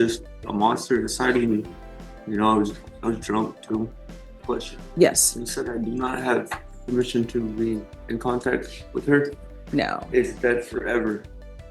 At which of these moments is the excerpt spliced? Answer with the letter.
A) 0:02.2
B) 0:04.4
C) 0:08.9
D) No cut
B